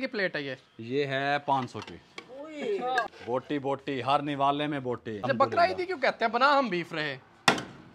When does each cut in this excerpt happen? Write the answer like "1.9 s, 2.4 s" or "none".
3.1 s, 5.3 s